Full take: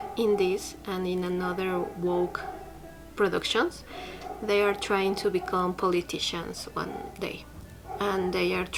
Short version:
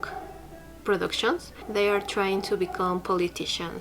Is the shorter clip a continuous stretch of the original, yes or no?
no